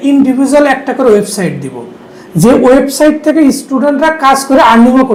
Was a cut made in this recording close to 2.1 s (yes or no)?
no